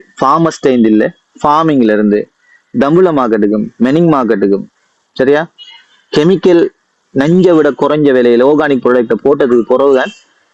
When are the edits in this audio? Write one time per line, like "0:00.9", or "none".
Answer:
none